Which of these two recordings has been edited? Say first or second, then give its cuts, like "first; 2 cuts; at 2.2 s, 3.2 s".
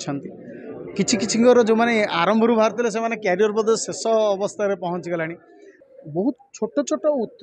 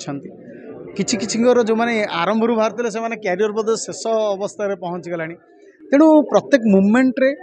first; 1 cut; at 5.8 s